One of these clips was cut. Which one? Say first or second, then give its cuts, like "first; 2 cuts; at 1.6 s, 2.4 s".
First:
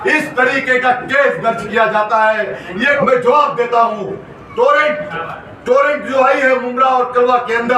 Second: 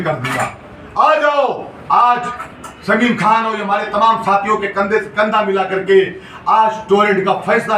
first; 1 cut; at 3.0 s